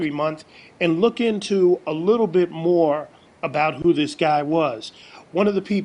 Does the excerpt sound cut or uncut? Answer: uncut